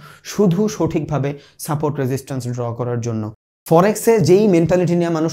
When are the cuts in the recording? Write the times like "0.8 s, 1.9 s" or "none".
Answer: 3.5 s